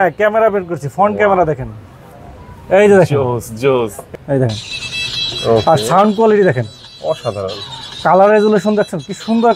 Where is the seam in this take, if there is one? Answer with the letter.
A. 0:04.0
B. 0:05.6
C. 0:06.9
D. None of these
A